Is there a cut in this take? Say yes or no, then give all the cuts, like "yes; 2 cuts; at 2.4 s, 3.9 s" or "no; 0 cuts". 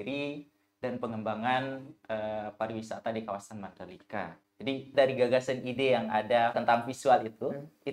yes; 2 cuts; at 4.9 s, 6.6 s